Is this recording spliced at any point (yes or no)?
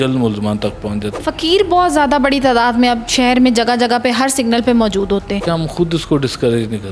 yes